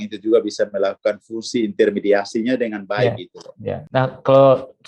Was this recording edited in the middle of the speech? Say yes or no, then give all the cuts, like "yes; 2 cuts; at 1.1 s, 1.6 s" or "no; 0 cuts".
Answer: yes; 1 cut; at 3.8 s